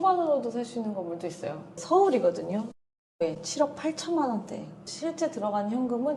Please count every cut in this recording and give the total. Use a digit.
1